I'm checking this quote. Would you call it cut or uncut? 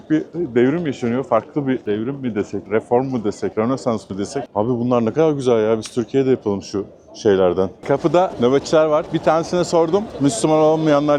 cut